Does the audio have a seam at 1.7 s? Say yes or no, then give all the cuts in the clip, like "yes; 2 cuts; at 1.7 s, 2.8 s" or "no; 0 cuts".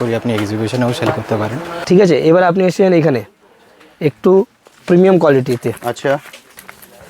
yes; 1 cut; at 1.7 s